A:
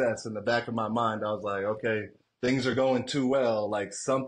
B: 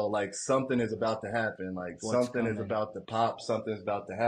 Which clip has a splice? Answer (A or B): A